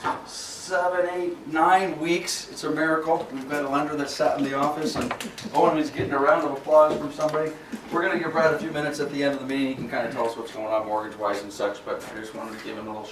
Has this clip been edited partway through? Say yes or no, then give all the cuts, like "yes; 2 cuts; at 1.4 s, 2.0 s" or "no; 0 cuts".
no; 0 cuts